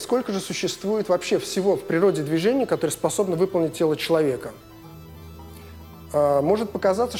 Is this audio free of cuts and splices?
yes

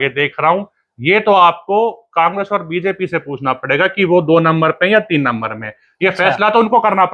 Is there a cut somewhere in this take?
no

